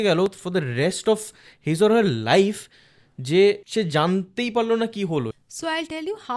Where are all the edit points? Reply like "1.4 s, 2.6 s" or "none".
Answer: 3.6 s, 5.4 s